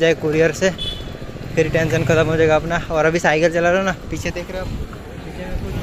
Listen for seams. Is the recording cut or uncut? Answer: uncut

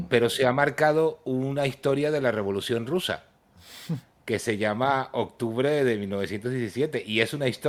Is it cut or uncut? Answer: uncut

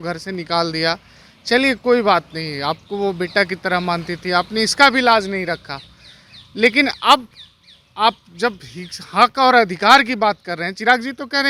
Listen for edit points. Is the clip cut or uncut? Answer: uncut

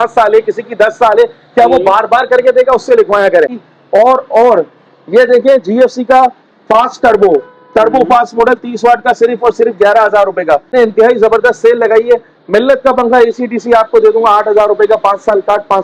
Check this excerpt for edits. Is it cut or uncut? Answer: cut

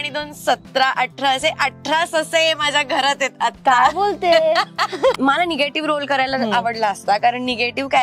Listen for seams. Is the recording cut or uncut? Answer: cut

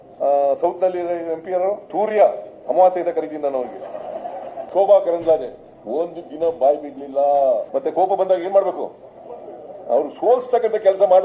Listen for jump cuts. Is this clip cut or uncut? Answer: cut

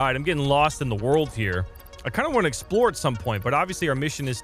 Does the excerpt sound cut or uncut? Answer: uncut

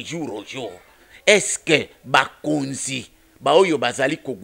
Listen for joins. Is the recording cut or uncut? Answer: uncut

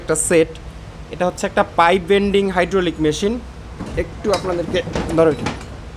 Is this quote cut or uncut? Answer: uncut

